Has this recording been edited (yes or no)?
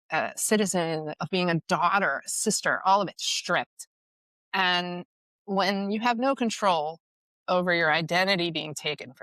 yes